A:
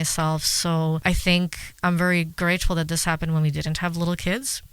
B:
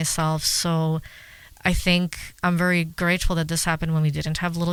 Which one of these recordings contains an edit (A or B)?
A